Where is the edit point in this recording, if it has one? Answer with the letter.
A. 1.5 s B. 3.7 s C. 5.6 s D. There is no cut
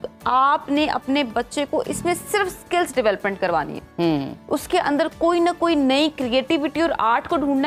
D